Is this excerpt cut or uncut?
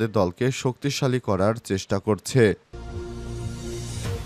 cut